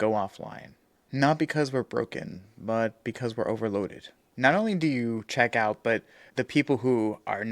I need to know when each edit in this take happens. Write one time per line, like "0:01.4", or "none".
0:04.2
0:06.2